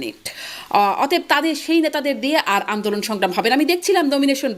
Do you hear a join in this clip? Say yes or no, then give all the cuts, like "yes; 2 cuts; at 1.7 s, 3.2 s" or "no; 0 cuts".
no; 0 cuts